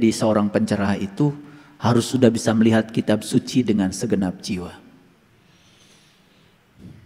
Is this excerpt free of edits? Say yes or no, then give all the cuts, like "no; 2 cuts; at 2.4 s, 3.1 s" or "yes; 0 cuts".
yes; 0 cuts